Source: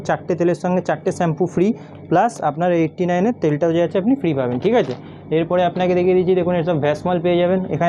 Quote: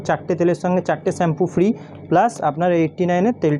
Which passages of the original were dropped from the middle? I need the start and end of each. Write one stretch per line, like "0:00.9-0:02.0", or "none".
none